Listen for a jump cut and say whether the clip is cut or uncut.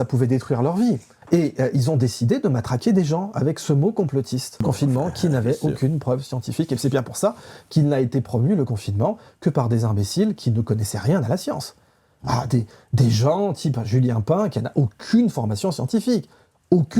cut